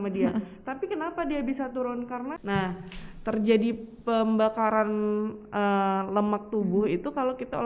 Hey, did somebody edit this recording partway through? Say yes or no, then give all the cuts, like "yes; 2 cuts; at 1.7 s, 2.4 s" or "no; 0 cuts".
yes; 1 cut; at 2.4 s